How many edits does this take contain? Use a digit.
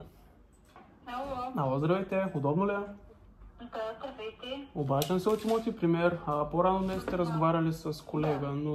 1